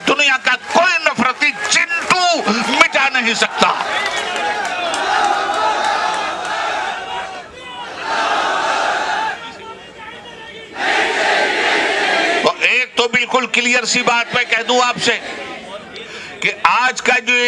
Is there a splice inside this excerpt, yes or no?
no